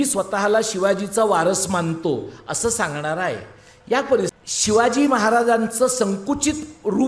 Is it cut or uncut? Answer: cut